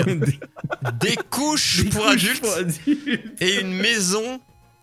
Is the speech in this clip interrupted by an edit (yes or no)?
no